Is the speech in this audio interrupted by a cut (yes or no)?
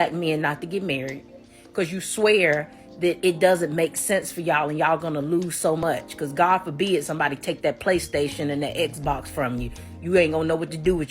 yes